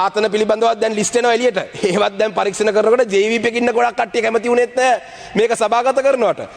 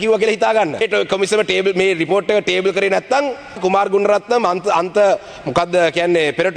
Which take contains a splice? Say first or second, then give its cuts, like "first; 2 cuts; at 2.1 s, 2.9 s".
second; 2 cuts; at 0.8 s, 3.6 s